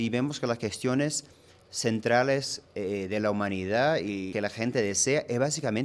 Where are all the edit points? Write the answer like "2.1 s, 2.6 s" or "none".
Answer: 4.3 s